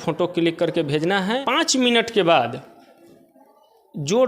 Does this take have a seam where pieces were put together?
yes; 1 cut; at 1.4 s

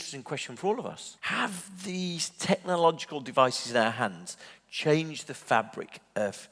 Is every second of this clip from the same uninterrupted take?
no; 1 cut; at 1.1 s

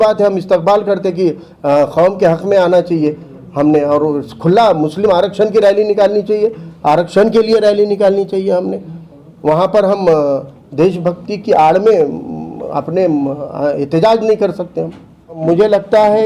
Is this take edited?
yes; 1 cut; at 15.4 s

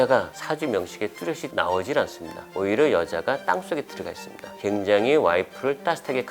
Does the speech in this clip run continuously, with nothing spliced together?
yes; 0 cuts

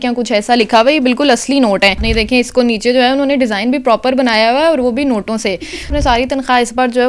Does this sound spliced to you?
yes; 2 cuts; at 2.0 s, 5.9 s

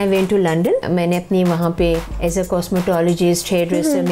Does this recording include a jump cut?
yes; 2 cuts; at 0.8 s, 2.1 s

